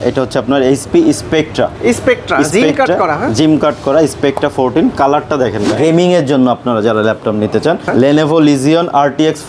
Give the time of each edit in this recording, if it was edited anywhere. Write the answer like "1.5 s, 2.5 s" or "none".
5.7 s, 7.8 s